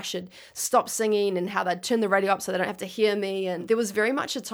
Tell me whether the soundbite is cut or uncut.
cut